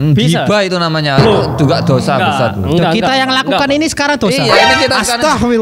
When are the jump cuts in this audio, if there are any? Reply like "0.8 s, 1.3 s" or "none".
none